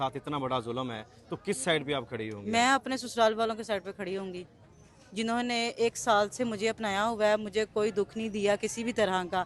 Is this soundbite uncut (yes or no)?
yes